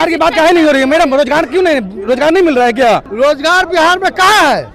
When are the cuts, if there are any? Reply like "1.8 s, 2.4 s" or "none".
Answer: 3.1 s